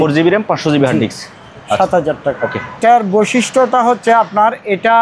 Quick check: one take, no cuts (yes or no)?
no